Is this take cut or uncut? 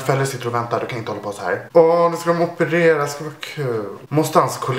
uncut